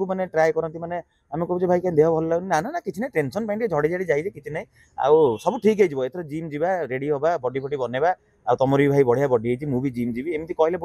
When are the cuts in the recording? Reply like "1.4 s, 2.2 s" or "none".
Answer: none